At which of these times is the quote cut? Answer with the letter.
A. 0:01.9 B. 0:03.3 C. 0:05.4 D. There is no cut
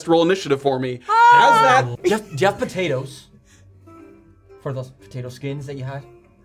A